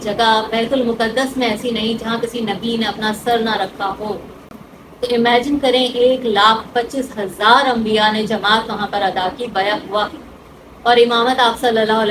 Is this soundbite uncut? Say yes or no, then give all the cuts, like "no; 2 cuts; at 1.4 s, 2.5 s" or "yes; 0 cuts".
yes; 0 cuts